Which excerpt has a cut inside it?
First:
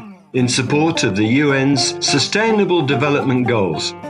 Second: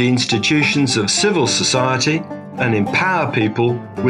first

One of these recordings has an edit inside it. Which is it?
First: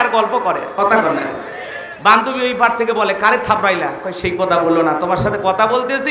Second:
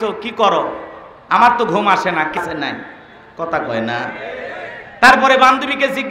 second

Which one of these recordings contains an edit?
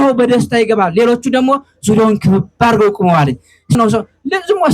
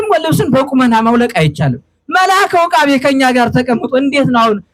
first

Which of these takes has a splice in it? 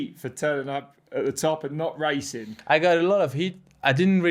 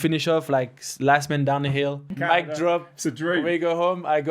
second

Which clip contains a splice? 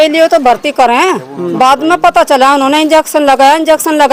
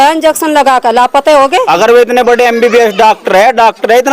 second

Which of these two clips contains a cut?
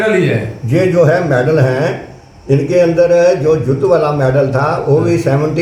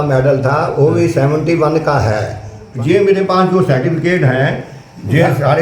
second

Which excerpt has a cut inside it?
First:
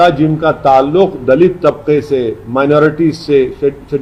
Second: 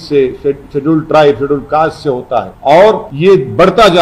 second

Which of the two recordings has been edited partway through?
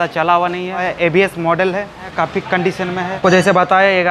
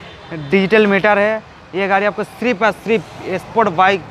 first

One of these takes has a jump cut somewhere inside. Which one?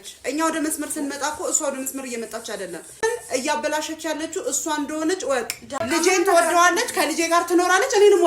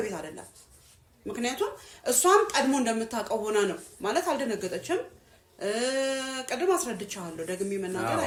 first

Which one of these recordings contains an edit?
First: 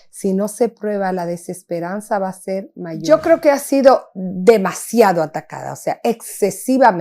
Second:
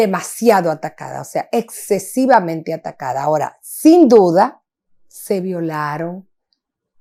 first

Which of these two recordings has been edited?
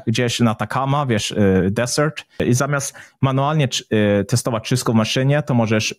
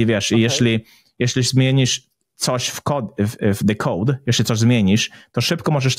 first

